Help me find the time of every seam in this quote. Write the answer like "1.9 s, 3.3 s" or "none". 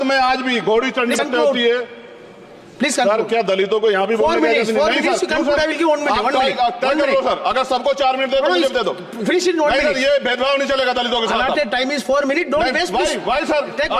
1.2 s

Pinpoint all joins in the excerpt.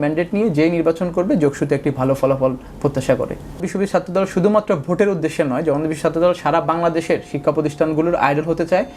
3.6 s

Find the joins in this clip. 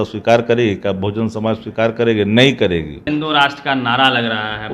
3.0 s

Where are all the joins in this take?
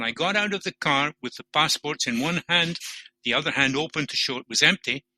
none

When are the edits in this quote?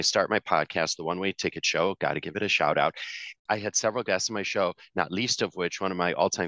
3.3 s

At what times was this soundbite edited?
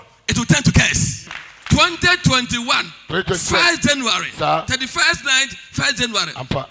1.3 s

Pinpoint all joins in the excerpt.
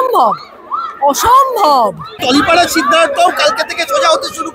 2.2 s

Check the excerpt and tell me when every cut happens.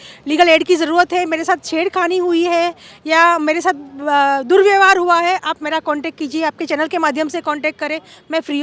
none

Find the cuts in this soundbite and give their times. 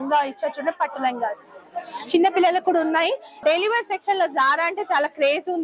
3.3 s

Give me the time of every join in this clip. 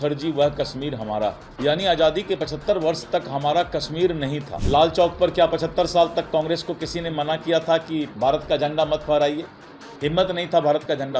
1.5 s, 4.5 s

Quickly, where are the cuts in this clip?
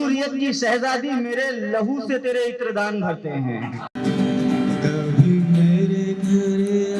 3.9 s

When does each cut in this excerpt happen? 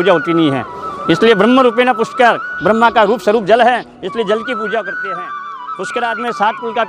5.5 s

